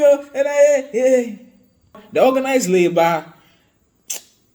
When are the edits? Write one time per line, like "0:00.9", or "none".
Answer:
0:02.0